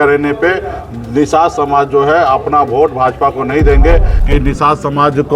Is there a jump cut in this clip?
yes; 1 cut; at 4.1 s

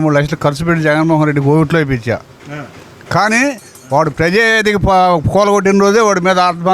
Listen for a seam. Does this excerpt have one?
no; 0 cuts

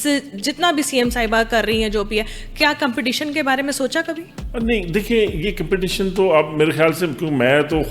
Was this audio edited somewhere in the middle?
no; 0 cuts

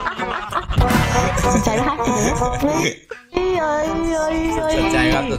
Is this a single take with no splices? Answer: yes; 0 cuts

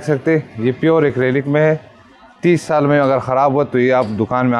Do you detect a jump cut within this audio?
no; 0 cuts

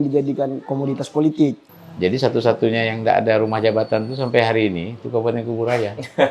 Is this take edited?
yes; 1 cut; at 1.7 s

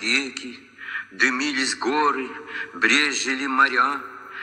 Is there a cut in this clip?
no; 0 cuts

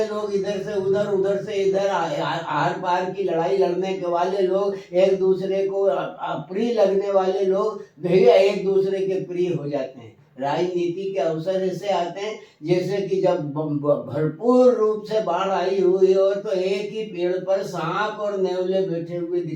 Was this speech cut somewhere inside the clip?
no; 0 cuts

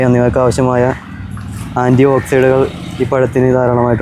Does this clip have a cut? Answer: no; 0 cuts

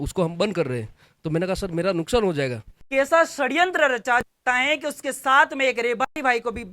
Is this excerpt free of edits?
no; 1 cut; at 2.8 s

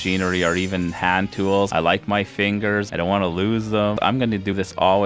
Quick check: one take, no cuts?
no; 3 cuts; at 1.7 s, 2.9 s, 4.1 s

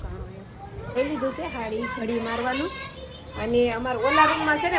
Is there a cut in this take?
yes; 1 cut; at 0.9 s

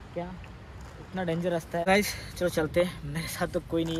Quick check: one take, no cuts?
no; 1 cut; at 1.9 s

